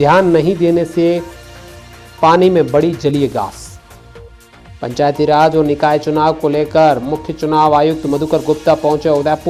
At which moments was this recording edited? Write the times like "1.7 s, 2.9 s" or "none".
none

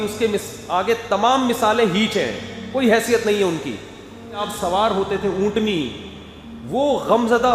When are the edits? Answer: 4.4 s

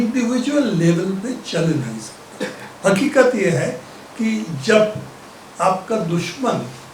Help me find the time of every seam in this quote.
none

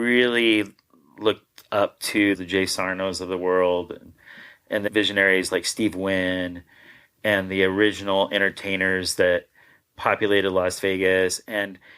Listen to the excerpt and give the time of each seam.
2.4 s, 4.8 s

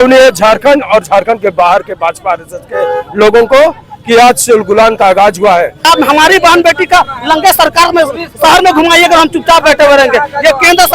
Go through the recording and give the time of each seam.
5.9 s

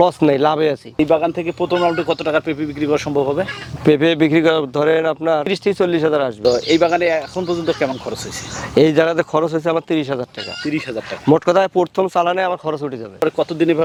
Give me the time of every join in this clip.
none

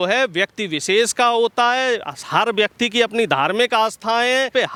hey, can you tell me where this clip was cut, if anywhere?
none

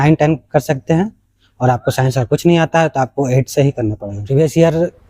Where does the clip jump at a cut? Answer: 4.1 s

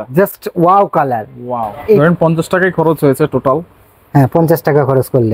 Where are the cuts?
2.0 s

